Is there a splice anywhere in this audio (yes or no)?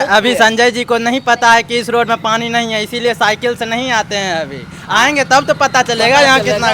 no